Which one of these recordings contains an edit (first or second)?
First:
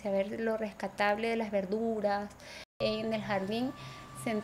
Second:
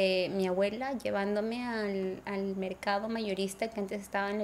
first